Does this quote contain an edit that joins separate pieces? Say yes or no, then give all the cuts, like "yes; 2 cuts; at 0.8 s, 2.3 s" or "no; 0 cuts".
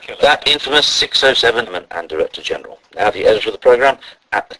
no; 0 cuts